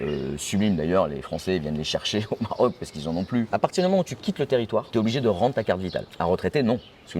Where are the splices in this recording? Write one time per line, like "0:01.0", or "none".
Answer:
0:03.5
0:04.9
0:06.1